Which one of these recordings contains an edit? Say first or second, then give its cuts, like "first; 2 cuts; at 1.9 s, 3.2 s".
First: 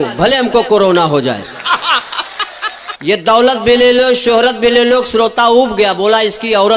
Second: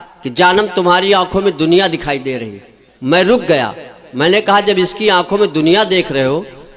first; 1 cut; at 2.9 s